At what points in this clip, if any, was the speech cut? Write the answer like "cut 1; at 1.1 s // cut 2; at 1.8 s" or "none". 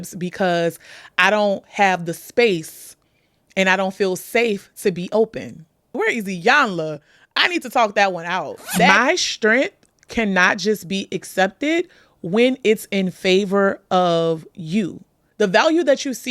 cut 1; at 5.9 s // cut 2; at 8.9 s // cut 3; at 15.2 s